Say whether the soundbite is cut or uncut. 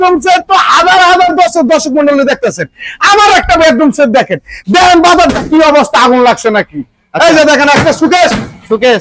uncut